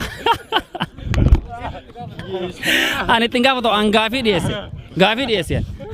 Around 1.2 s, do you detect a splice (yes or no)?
no